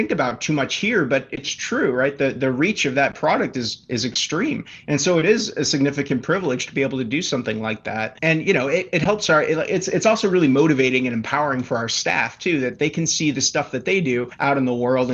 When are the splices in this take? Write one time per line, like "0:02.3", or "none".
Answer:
none